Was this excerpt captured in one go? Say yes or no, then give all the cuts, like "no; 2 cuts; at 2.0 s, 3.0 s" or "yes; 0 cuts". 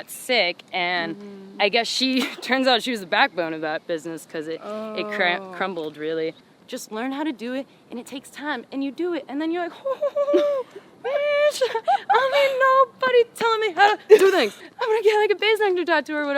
no; 2 cuts; at 6.5 s, 14.6 s